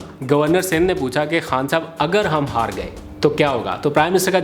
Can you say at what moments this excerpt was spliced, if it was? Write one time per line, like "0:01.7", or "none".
none